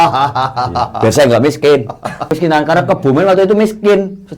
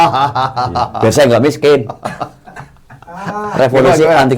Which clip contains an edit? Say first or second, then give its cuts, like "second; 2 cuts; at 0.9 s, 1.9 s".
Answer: first; 1 cut; at 2.3 s